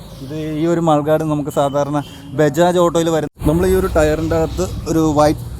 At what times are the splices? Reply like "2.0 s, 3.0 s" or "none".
3.3 s